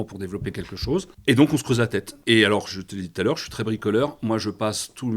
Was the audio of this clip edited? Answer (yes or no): yes